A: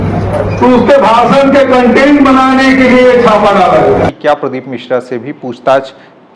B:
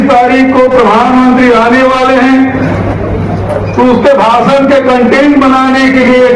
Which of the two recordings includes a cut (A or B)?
A